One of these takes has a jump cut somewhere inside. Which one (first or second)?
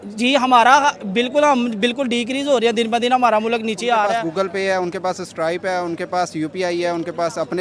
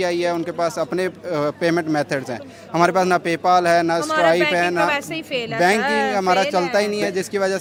first